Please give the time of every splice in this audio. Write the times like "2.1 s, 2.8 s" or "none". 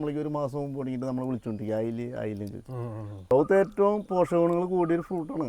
3.3 s